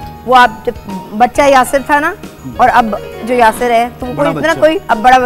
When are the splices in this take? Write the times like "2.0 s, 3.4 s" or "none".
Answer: 2.5 s